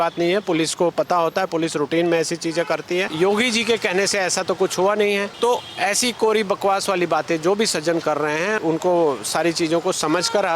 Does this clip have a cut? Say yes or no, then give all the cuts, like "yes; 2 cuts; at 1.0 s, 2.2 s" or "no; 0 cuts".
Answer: yes; 3 cuts; at 3.1 s, 5.3 s, 8.6 s